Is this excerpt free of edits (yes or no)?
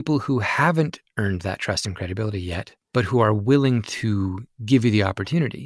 yes